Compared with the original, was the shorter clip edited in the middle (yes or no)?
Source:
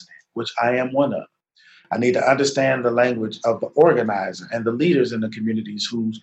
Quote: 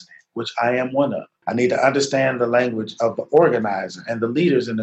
yes